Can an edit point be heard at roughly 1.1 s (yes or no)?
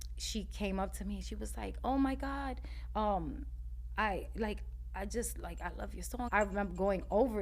no